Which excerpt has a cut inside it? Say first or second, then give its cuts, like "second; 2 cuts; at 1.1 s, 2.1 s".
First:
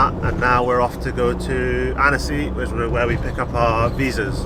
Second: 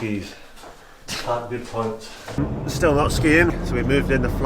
second; 2 cuts; at 2.2 s, 3.5 s